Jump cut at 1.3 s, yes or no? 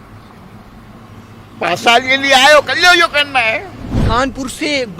no